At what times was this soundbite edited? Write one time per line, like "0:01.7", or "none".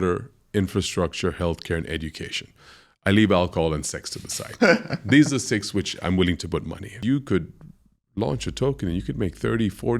0:07.0